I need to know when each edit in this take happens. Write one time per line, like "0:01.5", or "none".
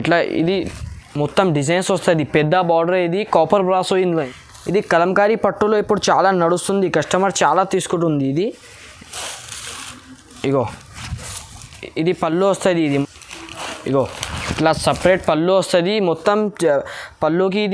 0:04.1
0:13.0